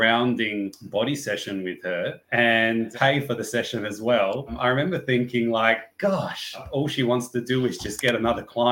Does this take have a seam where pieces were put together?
yes; 3 cuts; at 2.9 s, 4.6 s, 6.6 s

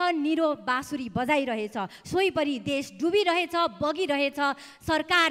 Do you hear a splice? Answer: no; 0 cuts

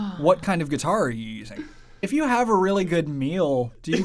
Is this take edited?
yes; 1 cut; at 1.8 s

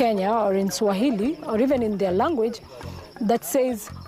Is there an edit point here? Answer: no; 0 cuts

